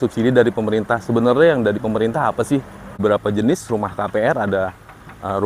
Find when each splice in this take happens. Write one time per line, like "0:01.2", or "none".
0:03.0